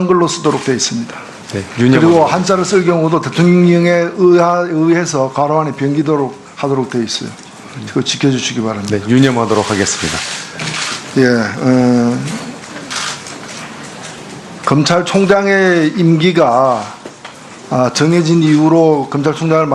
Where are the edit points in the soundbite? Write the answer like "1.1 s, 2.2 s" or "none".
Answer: 17.7 s